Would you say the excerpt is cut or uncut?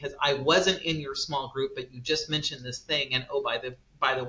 uncut